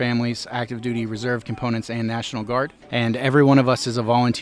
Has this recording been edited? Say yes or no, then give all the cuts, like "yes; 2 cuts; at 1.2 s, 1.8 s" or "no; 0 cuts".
yes; 1 cut; at 2.8 s